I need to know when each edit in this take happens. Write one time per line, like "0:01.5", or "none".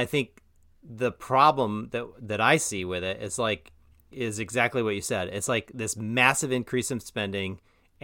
none